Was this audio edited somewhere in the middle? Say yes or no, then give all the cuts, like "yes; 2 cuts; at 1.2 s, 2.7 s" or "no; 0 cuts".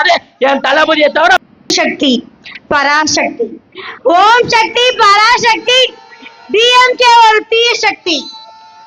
yes; 1 cut; at 1.4 s